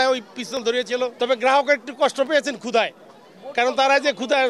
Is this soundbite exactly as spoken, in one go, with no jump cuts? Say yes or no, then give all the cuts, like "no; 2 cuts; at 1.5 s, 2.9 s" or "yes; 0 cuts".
no; 1 cut; at 1.1 s